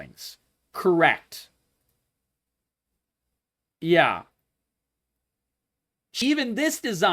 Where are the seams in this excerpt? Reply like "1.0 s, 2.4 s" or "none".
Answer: 6.1 s

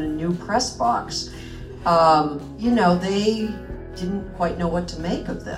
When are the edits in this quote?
2.4 s

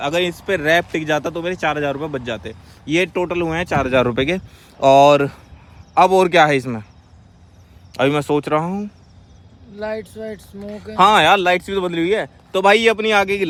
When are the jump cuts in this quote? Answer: none

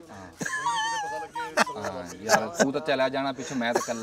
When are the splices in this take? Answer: none

